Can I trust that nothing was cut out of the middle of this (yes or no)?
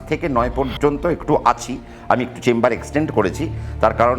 yes